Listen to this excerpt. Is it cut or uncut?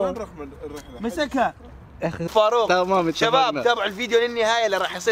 cut